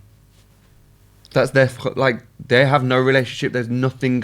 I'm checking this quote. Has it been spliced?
no; 0 cuts

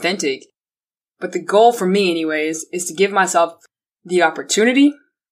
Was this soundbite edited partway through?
no; 0 cuts

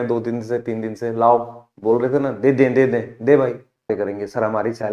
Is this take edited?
yes; 1 cut; at 3.8 s

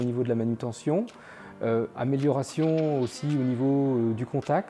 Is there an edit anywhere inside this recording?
no; 0 cuts

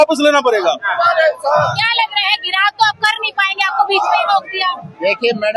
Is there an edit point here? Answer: no; 0 cuts

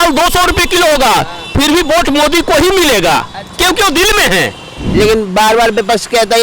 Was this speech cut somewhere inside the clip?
yes; 1 cut; at 4.8 s

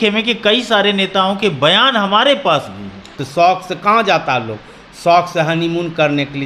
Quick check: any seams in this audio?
yes; 1 cut; at 3.2 s

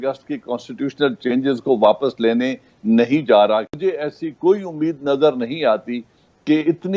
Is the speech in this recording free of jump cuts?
no; 1 cut; at 3.8 s

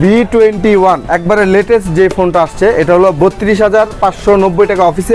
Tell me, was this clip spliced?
no; 0 cuts

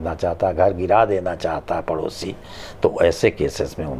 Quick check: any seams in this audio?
no; 0 cuts

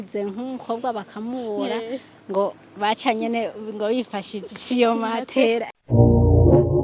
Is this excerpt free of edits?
no; 1 cut; at 5.8 s

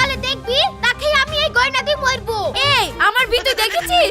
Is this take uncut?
no; 1 cut; at 2.6 s

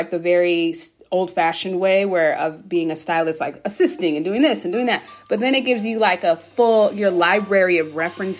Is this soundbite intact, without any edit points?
yes; 0 cuts

